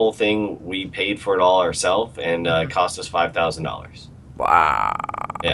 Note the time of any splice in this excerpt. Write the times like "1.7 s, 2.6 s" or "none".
none